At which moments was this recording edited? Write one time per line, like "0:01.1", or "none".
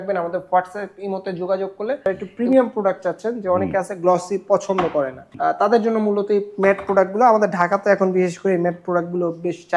0:02.1
0:05.2